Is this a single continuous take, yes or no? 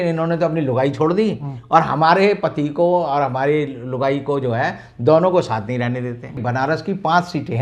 no